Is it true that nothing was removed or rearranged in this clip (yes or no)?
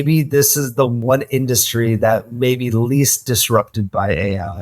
no